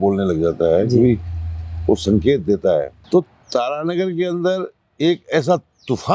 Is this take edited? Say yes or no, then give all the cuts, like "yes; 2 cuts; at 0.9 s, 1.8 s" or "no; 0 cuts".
yes; 1 cut; at 3.0 s